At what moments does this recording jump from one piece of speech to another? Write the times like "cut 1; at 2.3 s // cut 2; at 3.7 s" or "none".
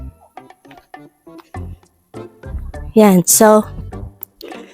cut 1; at 2.9 s